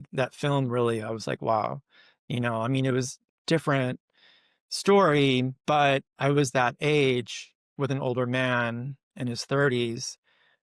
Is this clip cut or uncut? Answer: uncut